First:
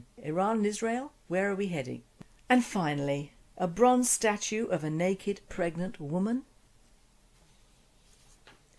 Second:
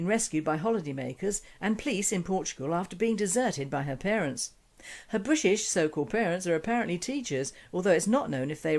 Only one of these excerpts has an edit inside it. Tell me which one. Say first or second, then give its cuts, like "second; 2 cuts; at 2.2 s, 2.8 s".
first; 1 cut; at 3.0 s